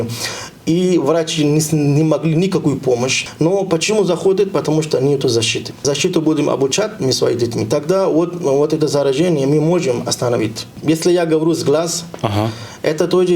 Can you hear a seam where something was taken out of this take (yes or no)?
yes